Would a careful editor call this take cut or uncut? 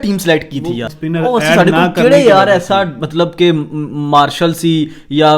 cut